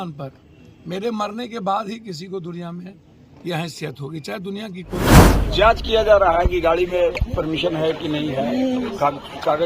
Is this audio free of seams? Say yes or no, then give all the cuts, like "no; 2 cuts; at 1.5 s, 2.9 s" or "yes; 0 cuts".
no; 1 cut; at 5.3 s